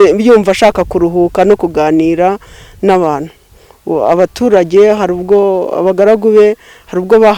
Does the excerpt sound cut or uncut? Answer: uncut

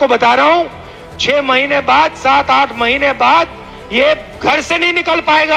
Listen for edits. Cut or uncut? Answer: uncut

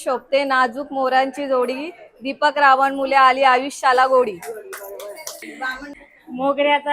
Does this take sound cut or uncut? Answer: cut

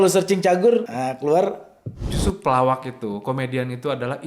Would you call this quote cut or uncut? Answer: cut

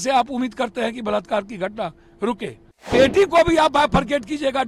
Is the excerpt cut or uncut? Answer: cut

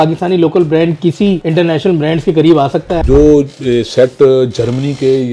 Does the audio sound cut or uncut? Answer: cut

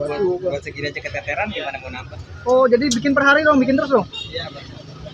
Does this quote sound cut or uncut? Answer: uncut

